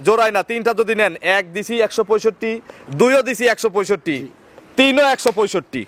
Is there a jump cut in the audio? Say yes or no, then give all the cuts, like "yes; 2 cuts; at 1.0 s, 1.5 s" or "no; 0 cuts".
no; 0 cuts